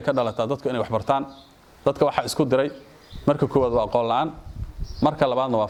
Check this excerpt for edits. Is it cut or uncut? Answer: uncut